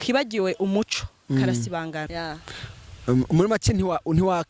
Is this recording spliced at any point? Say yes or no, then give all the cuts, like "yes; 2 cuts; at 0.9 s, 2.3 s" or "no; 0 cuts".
yes; 1 cut; at 2.1 s